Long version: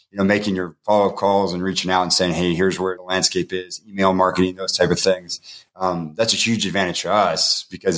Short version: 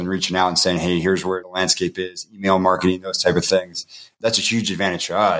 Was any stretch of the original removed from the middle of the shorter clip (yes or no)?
yes